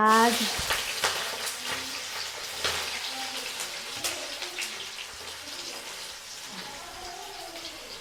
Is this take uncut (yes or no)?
yes